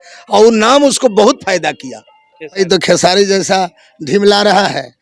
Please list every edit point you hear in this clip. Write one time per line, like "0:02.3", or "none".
0:02.6